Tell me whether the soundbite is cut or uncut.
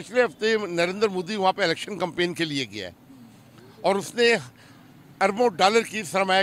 uncut